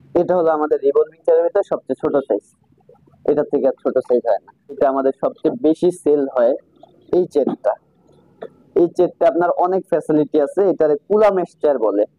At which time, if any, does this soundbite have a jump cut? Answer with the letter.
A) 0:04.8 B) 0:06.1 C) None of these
A